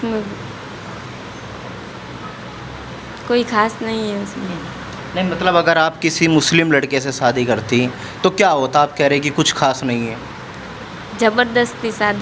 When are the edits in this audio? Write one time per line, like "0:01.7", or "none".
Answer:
none

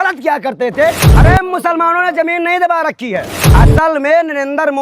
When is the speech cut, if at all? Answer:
0:01.1
0:03.4

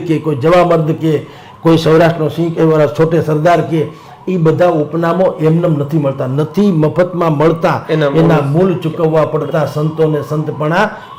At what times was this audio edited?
none

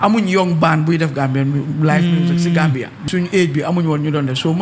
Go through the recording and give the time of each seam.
0:03.0

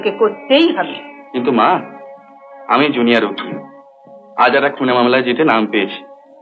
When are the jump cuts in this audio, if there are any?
none

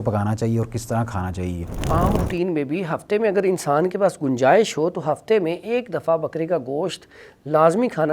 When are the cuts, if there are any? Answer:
0:01.9

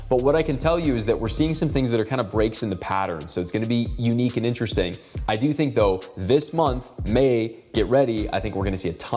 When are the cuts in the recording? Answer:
none

